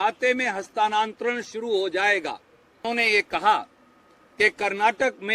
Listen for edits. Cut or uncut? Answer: cut